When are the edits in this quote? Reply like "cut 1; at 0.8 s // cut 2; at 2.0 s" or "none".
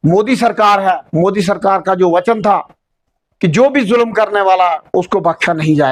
none